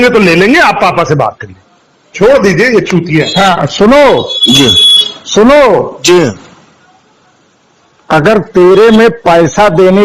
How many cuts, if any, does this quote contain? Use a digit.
0